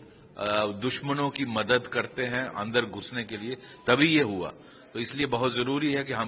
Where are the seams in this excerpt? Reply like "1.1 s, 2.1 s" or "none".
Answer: none